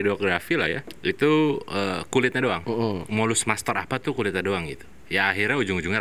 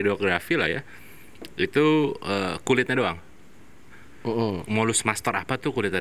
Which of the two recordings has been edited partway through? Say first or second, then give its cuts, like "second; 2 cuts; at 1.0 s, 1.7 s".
first; 2 cuts; at 0.9 s, 2.6 s